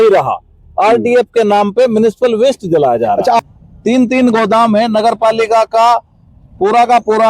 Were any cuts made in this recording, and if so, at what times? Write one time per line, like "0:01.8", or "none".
0:03.4